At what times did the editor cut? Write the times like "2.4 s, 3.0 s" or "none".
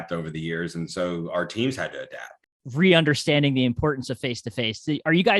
2.5 s